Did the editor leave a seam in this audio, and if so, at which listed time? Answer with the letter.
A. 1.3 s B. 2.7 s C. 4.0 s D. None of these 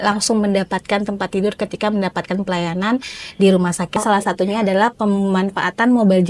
C